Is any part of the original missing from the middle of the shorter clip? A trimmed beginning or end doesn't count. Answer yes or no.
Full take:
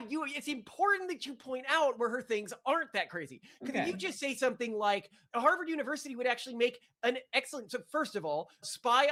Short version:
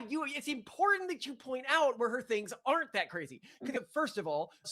yes